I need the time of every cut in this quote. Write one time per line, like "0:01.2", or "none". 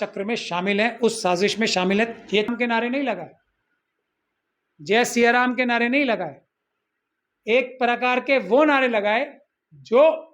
0:02.5